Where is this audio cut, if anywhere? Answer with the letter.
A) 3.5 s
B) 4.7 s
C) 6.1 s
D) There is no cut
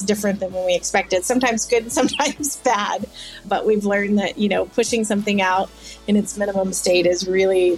A